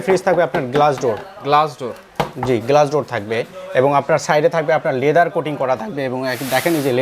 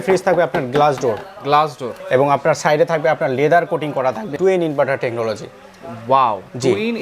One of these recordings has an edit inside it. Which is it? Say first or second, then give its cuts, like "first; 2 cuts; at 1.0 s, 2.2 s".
second; 2 cuts; at 1.9 s, 4.4 s